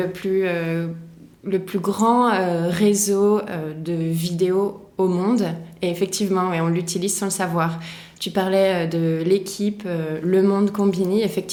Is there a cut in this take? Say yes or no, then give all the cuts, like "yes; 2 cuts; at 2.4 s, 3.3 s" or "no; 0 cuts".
no; 0 cuts